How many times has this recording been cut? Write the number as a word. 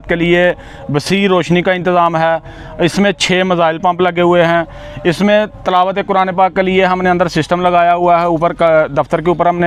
zero